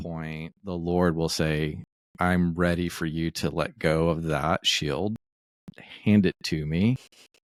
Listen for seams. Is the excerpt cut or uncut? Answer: uncut